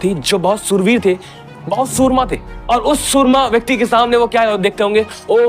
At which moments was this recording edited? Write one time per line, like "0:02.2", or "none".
0:02.5

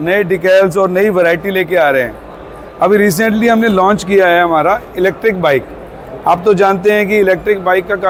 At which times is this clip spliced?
none

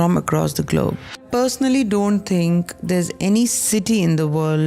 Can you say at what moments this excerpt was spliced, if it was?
0:01.2

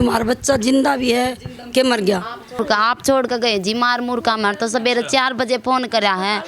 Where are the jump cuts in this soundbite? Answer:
0:02.6

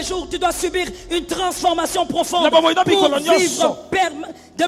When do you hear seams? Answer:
none

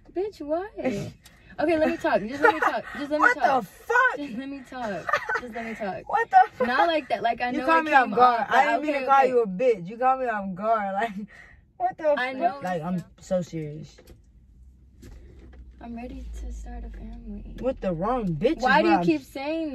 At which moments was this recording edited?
0:12.6

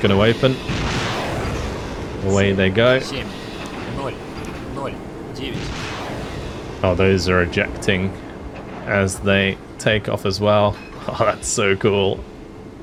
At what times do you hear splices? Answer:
none

